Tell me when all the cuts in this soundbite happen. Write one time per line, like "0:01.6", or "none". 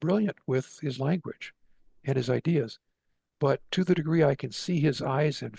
none

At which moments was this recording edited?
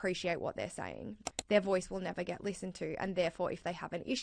0:01.3

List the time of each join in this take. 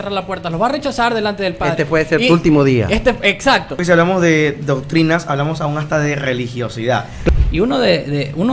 0:03.8
0:07.3

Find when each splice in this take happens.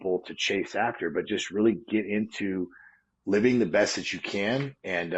none

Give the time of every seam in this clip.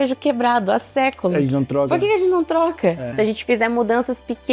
0:03.1

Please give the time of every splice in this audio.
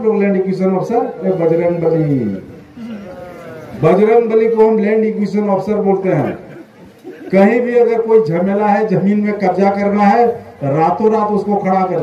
0:01.2
0:03.7

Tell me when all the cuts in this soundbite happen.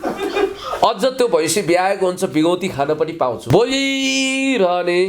0:03.4

